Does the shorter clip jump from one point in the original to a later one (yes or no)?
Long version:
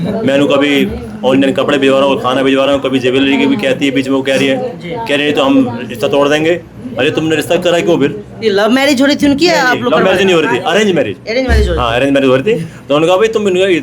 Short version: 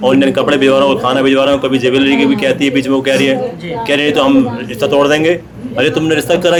no